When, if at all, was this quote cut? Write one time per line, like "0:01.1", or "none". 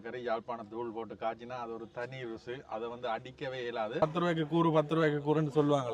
0:04.0